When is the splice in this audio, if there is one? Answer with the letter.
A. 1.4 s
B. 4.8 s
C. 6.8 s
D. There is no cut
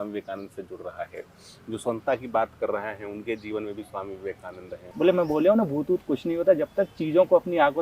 B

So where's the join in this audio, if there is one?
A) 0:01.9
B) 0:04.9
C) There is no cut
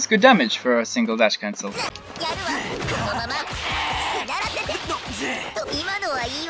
A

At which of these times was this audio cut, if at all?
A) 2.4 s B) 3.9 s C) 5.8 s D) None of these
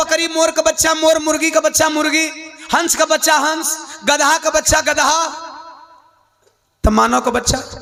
D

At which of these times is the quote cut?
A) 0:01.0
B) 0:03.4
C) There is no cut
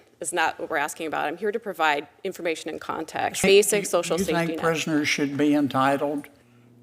B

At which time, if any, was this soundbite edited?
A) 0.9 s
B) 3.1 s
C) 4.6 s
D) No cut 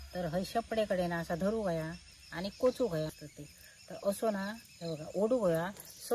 B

